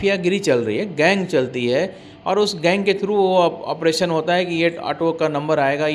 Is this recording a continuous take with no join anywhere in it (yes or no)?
yes